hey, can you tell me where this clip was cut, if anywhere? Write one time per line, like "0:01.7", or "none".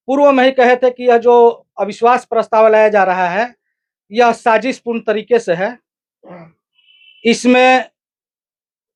none